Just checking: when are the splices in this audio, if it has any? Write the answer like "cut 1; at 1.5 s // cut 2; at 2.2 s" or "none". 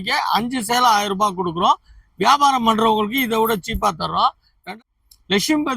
cut 1; at 4.6 s

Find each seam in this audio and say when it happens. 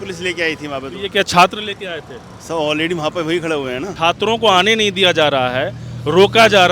cut 1; at 3.9 s

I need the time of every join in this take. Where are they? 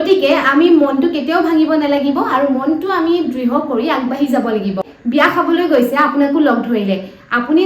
cut 1; at 4.9 s

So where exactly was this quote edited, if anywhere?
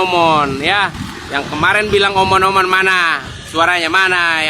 none

